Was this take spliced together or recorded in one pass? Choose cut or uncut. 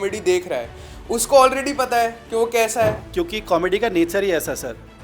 cut